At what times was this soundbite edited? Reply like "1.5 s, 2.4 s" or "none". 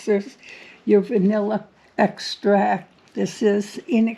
3.0 s